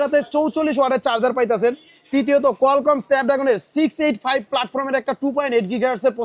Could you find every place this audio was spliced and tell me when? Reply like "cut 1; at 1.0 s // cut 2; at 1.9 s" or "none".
none